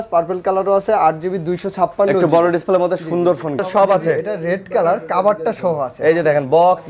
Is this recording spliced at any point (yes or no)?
yes